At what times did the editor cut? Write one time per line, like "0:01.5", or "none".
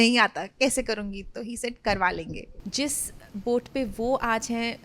0:02.5